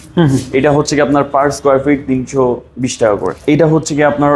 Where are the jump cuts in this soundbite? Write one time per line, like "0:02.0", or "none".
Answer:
0:03.3